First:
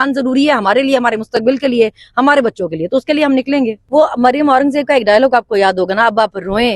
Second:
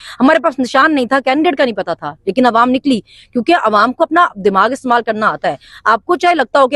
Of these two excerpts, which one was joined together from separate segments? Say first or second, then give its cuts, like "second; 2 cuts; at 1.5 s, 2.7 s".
first; 1 cut; at 3.8 s